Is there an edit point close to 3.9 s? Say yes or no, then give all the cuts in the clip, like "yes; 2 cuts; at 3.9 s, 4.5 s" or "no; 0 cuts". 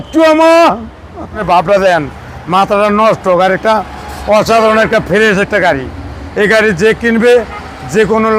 no; 1 cut; at 1.4 s